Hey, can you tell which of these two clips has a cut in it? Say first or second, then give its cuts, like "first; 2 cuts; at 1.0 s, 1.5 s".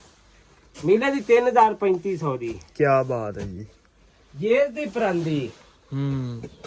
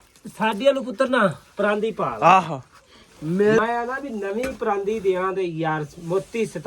second; 1 cut; at 3.6 s